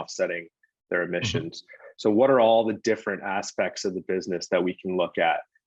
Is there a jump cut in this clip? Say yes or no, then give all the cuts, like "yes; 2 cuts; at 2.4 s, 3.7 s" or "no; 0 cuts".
no; 0 cuts